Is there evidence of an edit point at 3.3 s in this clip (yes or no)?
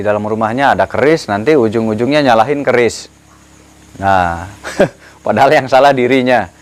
no